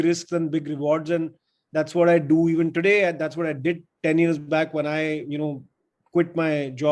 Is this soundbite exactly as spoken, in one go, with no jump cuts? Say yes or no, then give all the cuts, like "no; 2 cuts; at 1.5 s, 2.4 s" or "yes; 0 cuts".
yes; 0 cuts